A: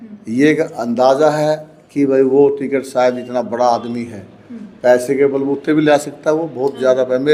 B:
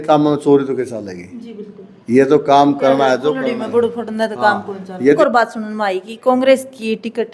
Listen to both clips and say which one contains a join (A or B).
B